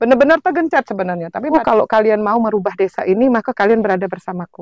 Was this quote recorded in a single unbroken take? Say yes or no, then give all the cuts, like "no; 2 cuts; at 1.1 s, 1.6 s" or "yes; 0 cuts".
no; 1 cut; at 1.4 s